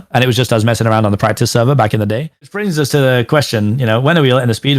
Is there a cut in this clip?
yes; 1 cut; at 2.3 s

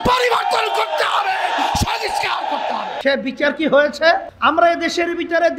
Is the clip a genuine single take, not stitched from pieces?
no; 2 cuts; at 2.9 s, 4.3 s

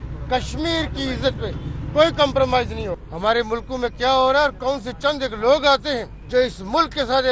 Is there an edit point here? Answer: yes; 2 cuts; at 3.1 s, 6.1 s

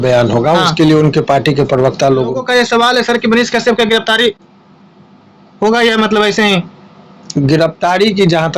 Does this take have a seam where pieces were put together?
yes; 1 cut; at 2.4 s

